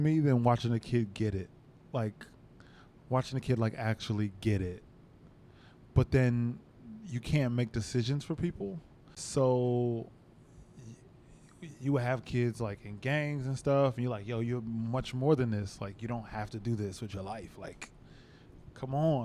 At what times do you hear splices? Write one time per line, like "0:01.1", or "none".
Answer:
0:01.7
0:09.2